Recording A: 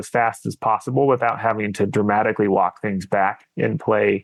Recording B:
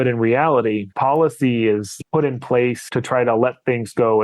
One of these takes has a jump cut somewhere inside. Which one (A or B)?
B